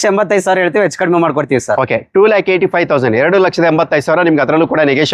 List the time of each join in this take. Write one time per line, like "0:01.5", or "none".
none